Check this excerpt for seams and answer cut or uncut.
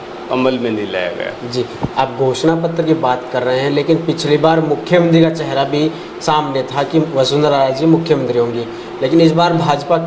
uncut